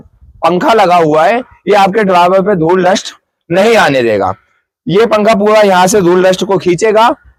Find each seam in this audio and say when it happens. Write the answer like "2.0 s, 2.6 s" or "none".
none